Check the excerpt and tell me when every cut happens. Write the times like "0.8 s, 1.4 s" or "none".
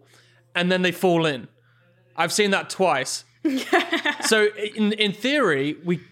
none